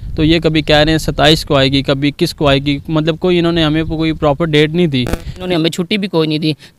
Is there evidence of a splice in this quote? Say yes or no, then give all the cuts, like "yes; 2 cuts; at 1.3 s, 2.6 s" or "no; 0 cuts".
yes; 1 cut; at 5.4 s